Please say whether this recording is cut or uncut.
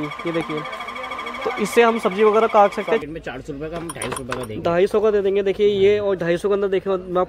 cut